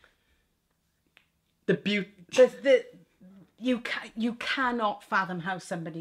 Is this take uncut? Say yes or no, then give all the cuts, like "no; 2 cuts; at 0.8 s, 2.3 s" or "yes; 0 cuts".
yes; 0 cuts